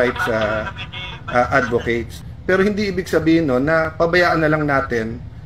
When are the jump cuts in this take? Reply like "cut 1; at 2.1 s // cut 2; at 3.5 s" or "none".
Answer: cut 1; at 2.2 s